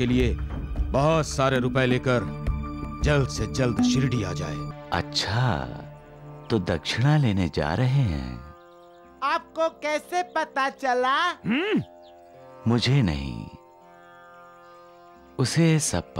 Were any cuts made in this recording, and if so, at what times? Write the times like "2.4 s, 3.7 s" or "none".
4.7 s